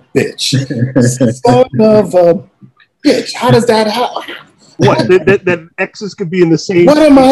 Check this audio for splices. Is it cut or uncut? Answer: uncut